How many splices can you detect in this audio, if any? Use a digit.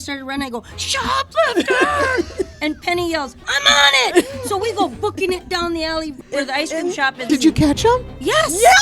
2